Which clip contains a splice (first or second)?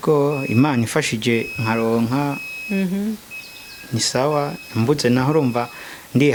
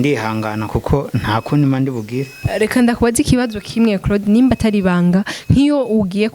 second